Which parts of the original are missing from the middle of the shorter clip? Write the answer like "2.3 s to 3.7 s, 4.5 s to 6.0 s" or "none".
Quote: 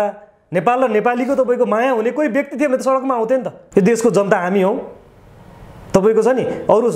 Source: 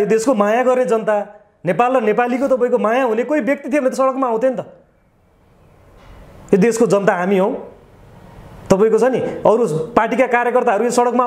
4.7 s to 6.3 s